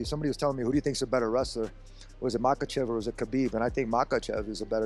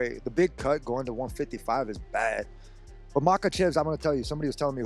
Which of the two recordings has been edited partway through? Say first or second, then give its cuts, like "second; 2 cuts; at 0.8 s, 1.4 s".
second; 1 cut; at 3.0 s